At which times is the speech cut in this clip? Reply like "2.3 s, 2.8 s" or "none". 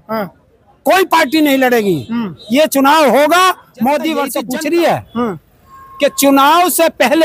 4.3 s